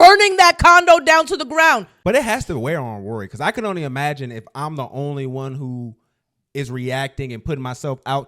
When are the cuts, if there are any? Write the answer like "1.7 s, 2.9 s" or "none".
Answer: 1.9 s